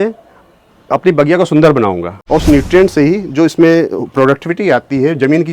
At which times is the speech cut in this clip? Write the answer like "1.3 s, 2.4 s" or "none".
2.1 s

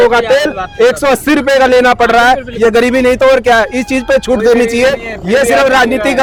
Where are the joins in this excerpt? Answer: none

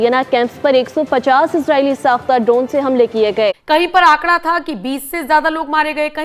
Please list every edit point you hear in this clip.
3.6 s

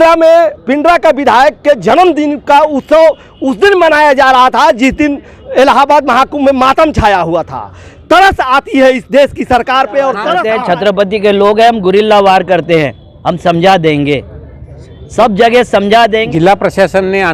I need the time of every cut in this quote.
10.3 s, 16.3 s

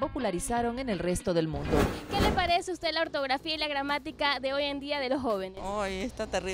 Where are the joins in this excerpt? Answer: 2.0 s

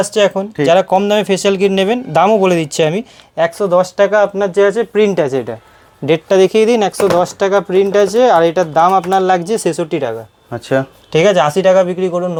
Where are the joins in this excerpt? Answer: none

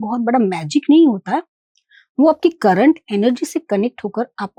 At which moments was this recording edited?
none

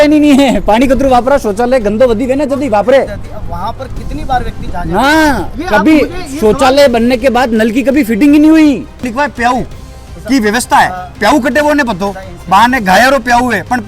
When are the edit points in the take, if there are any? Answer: 3.2 s, 9.0 s

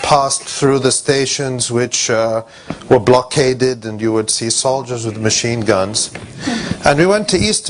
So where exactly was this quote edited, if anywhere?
none

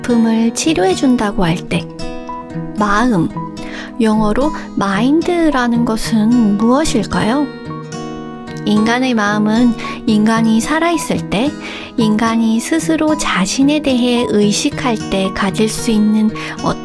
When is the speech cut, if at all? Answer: none

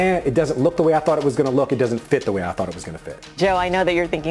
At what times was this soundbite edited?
3.4 s

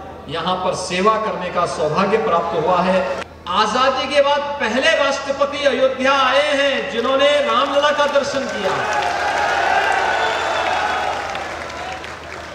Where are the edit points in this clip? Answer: 3.3 s

